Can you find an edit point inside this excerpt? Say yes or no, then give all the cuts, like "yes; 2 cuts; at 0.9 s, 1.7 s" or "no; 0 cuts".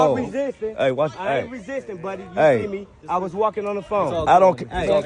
no; 0 cuts